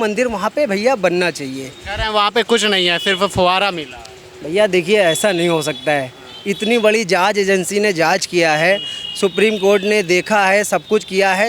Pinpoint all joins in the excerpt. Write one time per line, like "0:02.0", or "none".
none